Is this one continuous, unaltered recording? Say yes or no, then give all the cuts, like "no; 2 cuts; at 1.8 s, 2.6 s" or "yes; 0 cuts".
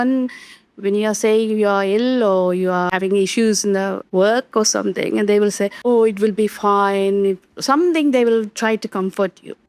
no; 3 cuts; at 2.9 s, 4.0 s, 5.8 s